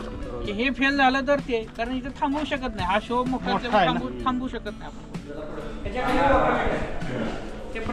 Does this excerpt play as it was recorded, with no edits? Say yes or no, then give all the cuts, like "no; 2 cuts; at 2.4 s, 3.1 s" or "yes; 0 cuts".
no; 1 cut; at 5.6 s